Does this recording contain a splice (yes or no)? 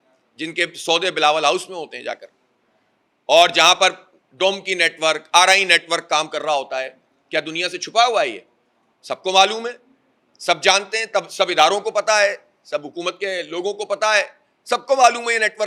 no